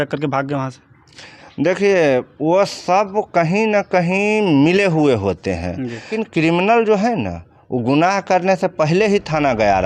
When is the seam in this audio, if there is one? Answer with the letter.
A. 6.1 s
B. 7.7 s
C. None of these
A